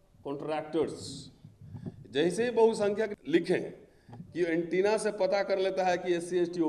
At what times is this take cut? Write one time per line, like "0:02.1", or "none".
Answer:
0:03.1